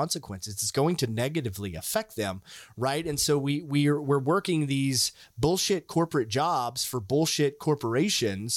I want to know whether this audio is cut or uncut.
uncut